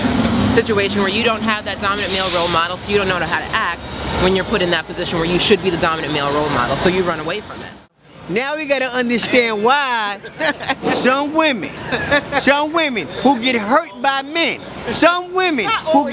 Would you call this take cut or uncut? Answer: cut